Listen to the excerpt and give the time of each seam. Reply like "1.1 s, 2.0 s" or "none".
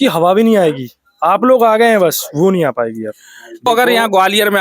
3.7 s

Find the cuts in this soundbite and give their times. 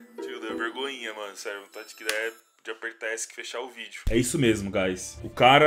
2.4 s

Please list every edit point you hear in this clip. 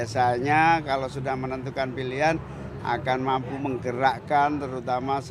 none

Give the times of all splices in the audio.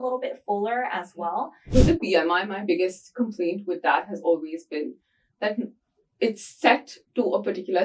1.7 s

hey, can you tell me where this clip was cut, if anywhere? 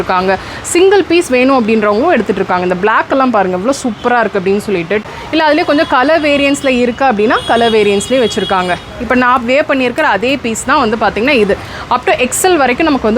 5.1 s

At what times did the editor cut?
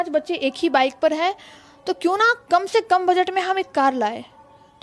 none

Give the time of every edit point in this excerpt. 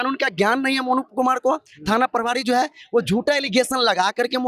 none

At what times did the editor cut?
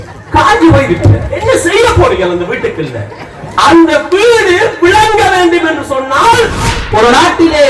6.8 s

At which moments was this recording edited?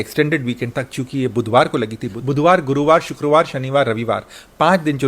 2.1 s

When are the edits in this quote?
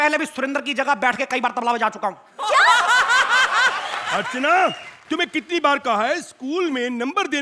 4.0 s

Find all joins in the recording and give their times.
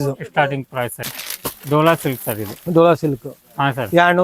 none

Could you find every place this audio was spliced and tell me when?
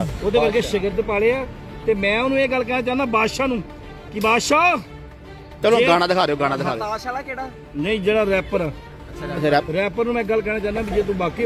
none

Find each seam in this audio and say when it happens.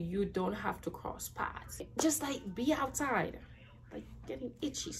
1.9 s

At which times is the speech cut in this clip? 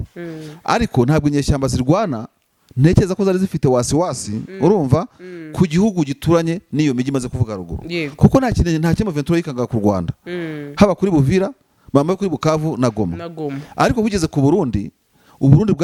none

